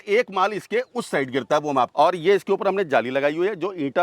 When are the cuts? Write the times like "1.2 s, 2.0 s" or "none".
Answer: 1.9 s

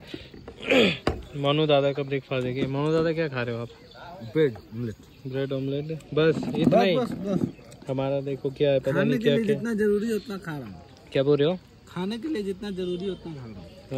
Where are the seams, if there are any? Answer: none

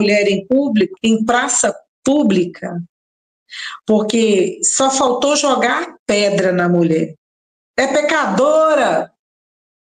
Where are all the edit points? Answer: 0.9 s

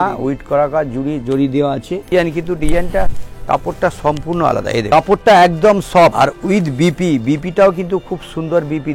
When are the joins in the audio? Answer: 2.1 s, 4.9 s, 6.1 s

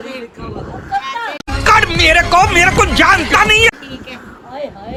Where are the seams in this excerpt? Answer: none

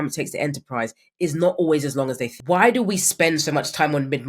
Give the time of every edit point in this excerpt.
2.3 s

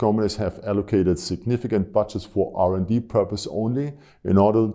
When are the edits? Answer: none

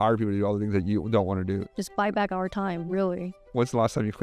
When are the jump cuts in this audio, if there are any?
1.7 s

